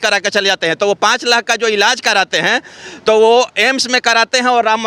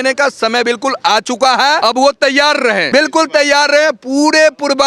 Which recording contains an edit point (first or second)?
second